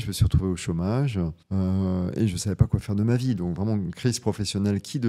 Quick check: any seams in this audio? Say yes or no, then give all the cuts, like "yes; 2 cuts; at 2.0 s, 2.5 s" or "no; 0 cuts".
yes; 1 cut; at 1.4 s